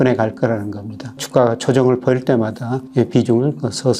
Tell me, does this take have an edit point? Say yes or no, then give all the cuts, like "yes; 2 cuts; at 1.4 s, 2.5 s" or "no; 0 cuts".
yes; 1 cut; at 1.2 s